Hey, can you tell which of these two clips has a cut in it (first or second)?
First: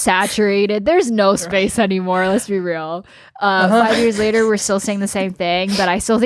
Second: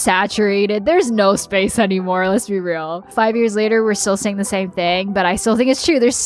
second